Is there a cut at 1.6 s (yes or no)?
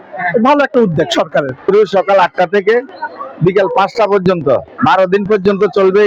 yes